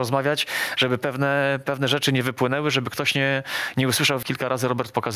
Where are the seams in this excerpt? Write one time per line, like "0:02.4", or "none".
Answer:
0:04.2